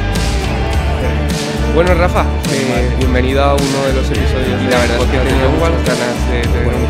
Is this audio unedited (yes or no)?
yes